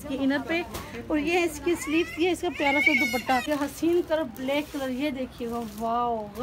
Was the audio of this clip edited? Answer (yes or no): yes